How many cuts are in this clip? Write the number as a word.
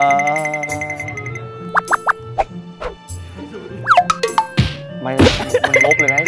zero